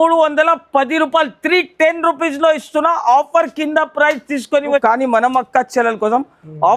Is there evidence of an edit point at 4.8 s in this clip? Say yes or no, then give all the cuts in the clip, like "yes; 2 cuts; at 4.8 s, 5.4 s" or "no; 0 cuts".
yes; 1 cut; at 4.8 s